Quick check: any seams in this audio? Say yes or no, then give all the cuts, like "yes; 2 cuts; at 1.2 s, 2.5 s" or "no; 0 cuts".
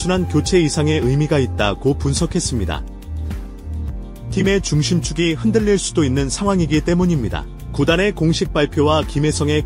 yes; 2 cuts; at 2.9 s, 4.3 s